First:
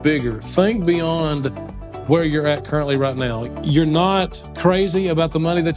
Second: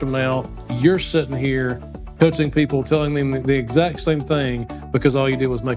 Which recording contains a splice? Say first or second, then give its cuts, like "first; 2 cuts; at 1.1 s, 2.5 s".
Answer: first; 1 cut; at 3.4 s